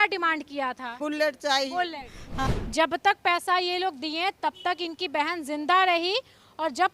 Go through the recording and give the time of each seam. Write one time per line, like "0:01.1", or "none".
0:01.0
0:02.4